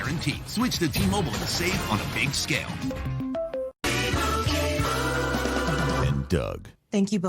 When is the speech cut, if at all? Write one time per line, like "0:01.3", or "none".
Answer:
0:03.8